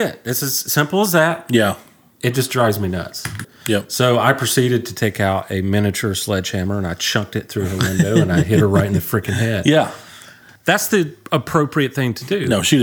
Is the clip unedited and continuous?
no; 1 cut; at 3.4 s

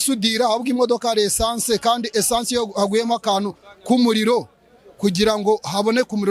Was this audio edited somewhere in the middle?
no; 0 cuts

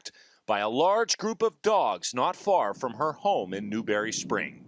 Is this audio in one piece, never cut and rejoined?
no; 1 cut; at 1.4 s

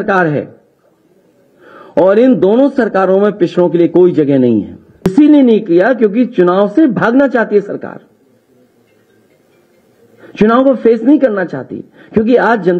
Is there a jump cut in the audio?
yes; 1 cut; at 5.1 s

